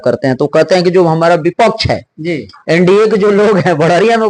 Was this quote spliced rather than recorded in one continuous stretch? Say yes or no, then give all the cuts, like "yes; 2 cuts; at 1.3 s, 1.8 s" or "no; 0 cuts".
no; 0 cuts